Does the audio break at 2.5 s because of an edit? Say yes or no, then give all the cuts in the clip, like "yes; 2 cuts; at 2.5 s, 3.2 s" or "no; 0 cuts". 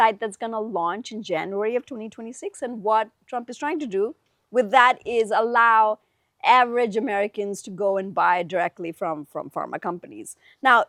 no; 0 cuts